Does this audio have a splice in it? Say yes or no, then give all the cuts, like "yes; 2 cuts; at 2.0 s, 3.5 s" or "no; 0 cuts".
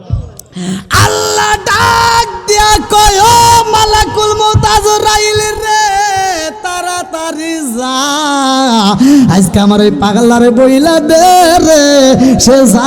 no; 0 cuts